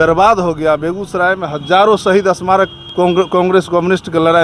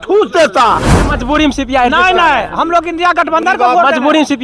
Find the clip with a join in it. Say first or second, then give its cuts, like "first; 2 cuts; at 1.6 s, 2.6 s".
second; 1 cut; at 1.1 s